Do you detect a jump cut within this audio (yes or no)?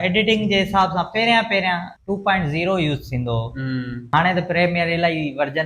yes